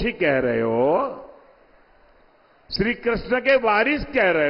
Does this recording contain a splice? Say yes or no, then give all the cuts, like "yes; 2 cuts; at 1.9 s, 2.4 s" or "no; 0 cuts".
no; 0 cuts